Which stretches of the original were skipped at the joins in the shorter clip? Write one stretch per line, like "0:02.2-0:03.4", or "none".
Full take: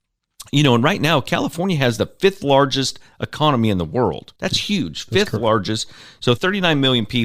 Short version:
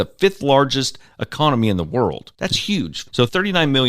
0:05.0-0:06.0